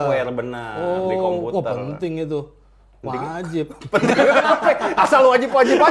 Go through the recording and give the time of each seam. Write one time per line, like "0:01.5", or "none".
none